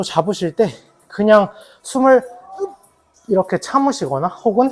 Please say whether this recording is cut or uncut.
uncut